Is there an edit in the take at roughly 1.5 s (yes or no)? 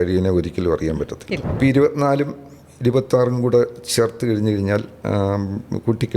yes